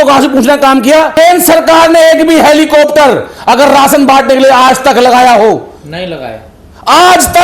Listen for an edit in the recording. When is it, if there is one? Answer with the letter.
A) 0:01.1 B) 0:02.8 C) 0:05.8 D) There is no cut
A